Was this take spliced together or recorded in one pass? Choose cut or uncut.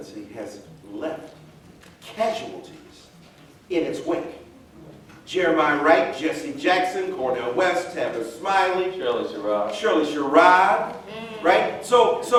uncut